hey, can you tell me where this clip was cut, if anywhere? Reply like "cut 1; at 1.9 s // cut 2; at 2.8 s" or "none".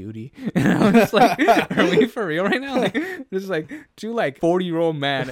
cut 1; at 4.3 s